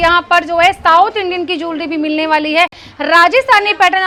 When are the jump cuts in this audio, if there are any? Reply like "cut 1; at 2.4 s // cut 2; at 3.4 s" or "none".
none